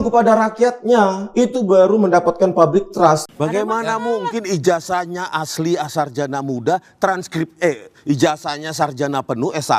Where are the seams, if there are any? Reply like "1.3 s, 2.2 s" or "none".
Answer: 3.3 s